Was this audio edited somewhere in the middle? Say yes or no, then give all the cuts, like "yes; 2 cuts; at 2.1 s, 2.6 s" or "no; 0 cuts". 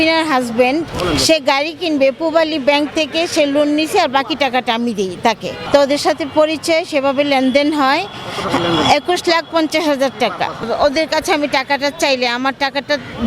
yes; 2 cuts; at 5.5 s, 10.7 s